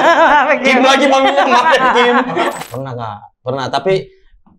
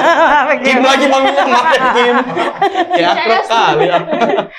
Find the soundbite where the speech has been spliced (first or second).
first